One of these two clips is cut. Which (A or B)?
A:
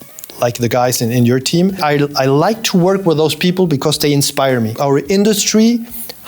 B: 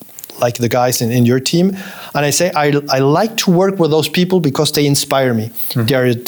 A